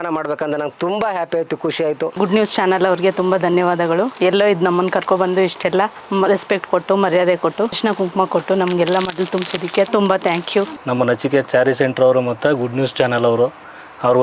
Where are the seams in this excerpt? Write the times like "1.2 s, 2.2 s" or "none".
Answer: 2.1 s, 7.8 s, 9.9 s, 10.8 s